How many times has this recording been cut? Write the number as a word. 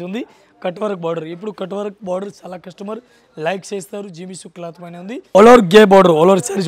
one